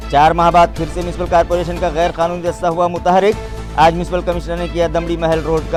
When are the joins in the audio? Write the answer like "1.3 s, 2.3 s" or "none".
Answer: none